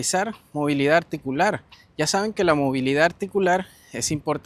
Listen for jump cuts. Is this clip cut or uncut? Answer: uncut